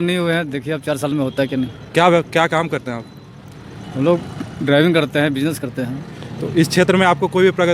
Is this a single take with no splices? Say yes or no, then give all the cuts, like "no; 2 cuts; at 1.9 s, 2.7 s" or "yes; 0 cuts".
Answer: yes; 0 cuts